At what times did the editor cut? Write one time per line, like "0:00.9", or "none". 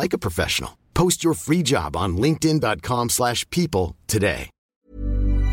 0:04.6